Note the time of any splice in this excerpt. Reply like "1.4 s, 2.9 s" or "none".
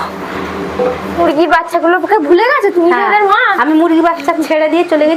1.2 s